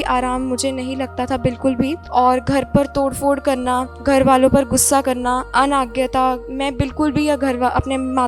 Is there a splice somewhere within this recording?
yes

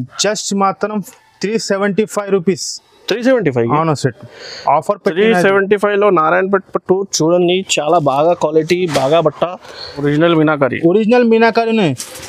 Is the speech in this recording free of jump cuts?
no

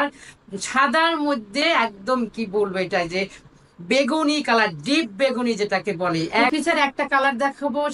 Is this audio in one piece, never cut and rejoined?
no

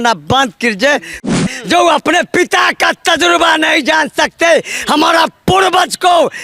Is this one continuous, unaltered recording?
no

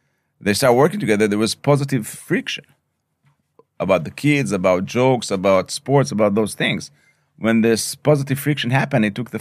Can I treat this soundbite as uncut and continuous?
yes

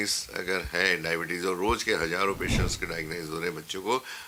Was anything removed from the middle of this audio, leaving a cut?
no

